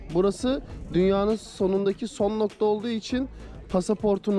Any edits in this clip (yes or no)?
no